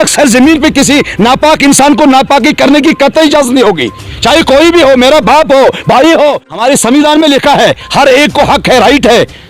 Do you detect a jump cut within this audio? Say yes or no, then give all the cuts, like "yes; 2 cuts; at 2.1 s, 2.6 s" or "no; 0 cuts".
yes; 1 cut; at 6.5 s